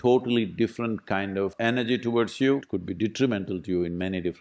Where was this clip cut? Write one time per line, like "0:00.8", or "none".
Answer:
0:02.7